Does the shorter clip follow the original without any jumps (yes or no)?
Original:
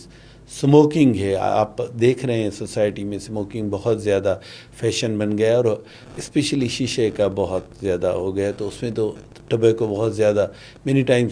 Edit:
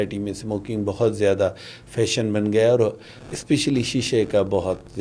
yes